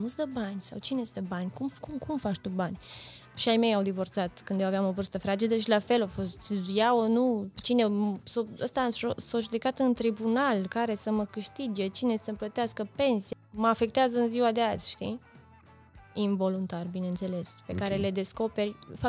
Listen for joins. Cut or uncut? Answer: cut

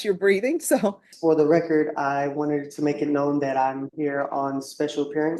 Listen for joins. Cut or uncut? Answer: cut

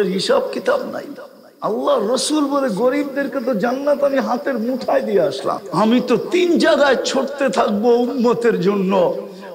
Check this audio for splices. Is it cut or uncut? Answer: cut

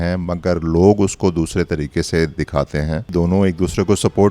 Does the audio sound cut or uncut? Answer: cut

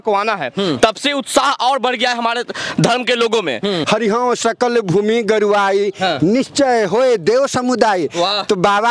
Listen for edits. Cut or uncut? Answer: cut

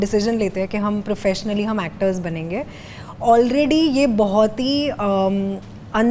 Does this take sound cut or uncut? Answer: uncut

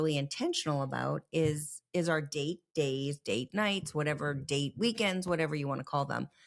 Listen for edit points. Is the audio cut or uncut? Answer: uncut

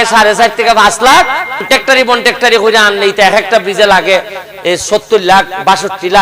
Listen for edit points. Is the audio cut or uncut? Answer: cut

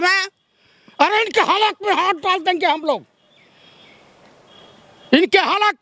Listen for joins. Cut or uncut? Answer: uncut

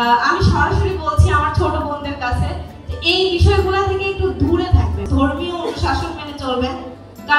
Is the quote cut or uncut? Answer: cut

